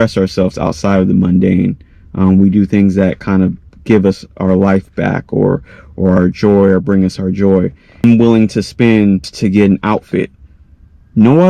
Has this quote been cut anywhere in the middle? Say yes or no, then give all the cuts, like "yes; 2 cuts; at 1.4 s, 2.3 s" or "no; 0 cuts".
yes; 2 cuts; at 8.0 s, 9.3 s